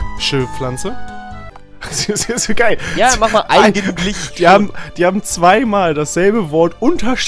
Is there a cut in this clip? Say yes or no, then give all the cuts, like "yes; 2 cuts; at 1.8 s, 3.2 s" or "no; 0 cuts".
no; 0 cuts